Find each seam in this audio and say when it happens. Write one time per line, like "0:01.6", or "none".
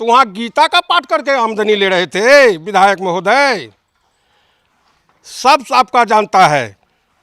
none